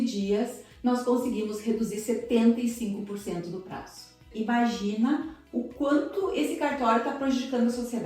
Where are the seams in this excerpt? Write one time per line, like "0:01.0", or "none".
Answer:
0:04.3